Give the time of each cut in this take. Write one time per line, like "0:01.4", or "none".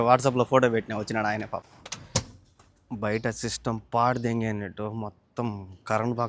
0:01.6